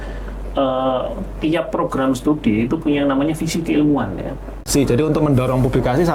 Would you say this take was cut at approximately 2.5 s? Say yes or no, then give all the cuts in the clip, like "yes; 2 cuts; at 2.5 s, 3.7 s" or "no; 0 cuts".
no; 1 cut; at 4.6 s